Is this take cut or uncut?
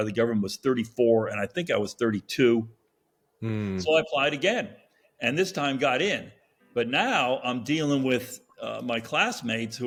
uncut